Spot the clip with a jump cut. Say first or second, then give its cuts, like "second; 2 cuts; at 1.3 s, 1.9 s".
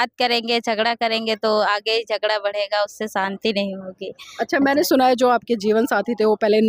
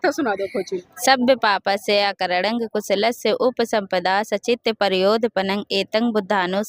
second; 1 cut; at 0.9 s